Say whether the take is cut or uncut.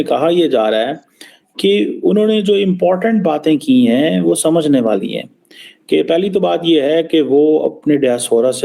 uncut